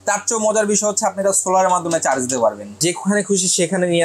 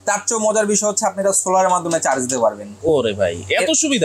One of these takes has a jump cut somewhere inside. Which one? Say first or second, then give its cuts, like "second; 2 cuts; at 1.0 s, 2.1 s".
first; 1 cut; at 2.8 s